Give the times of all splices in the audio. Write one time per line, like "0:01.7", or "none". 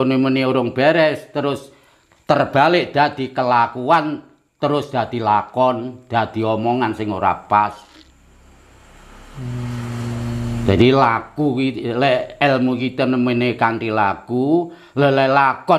none